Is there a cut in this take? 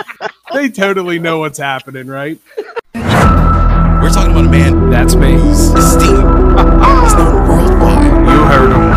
yes; 1 cut; at 2.8 s

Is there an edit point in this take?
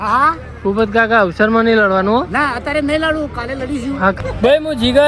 yes; 1 cut; at 4.2 s

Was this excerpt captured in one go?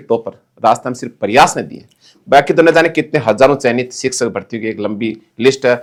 yes; 0 cuts

